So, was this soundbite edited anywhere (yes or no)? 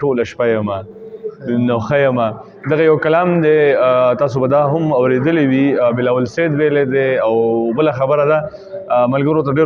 no